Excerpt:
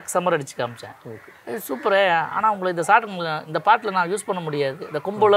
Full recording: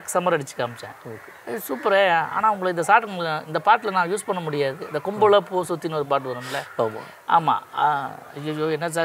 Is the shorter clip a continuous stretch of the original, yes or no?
yes